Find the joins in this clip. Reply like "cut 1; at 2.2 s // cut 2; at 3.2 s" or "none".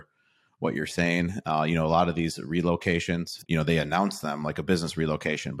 cut 1; at 3.4 s